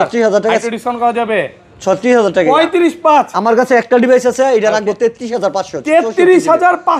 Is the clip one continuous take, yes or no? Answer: yes